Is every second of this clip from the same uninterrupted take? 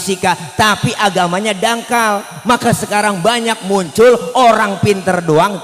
yes; 0 cuts

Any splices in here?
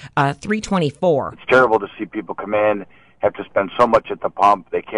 yes; 1 cut; at 1.3 s

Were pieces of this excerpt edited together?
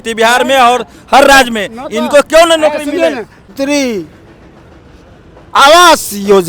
yes; 1 cut; at 3.5 s

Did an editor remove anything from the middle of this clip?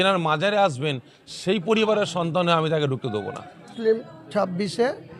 yes; 1 cut; at 3.7 s

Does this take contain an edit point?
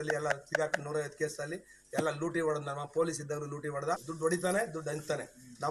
yes; 1 cut; at 4.1 s

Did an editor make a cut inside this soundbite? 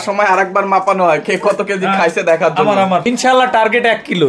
yes; 1 cut; at 3.1 s

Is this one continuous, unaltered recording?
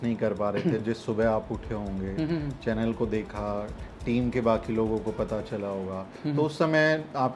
yes; 0 cuts

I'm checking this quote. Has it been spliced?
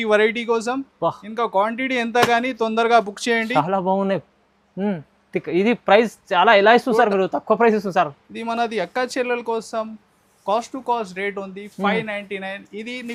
no; 0 cuts

